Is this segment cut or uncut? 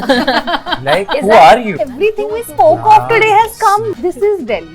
cut